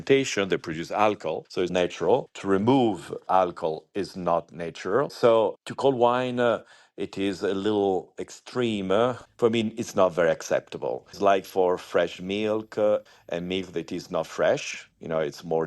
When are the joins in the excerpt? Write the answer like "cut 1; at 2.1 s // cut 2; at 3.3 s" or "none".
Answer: cut 1; at 1.7 s // cut 2; at 11.1 s